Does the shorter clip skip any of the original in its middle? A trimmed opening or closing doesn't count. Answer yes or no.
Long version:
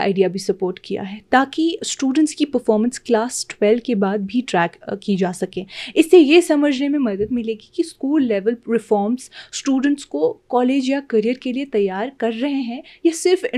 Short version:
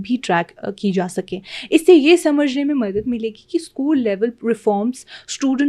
no